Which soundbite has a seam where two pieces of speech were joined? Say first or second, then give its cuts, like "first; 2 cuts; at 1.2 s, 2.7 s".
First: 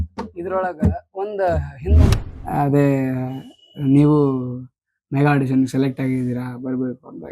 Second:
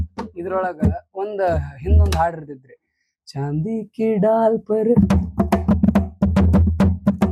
first; 1 cut; at 2.1 s